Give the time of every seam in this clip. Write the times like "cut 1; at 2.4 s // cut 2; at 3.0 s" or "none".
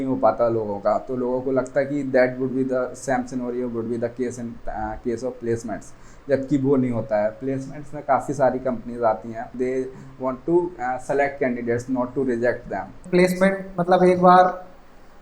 cut 1; at 9.5 s // cut 2; at 13.0 s